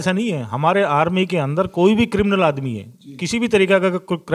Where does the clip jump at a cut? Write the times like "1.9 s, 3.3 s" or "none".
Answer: none

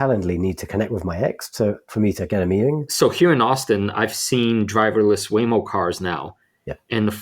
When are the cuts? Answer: 2.9 s

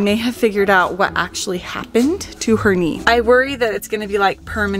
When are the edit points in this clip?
3.0 s

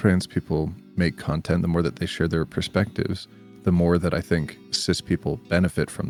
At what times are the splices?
none

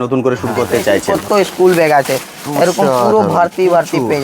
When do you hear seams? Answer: 1.1 s

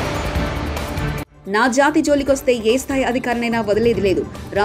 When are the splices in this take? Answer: 1.2 s

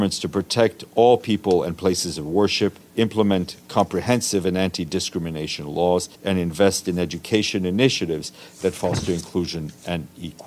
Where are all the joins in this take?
2.8 s, 6.1 s

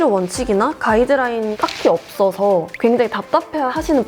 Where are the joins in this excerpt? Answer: 1.5 s

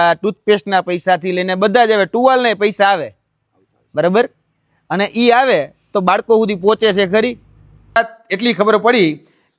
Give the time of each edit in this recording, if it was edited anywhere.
8.0 s

